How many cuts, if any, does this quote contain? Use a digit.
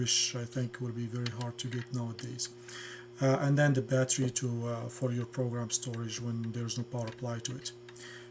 0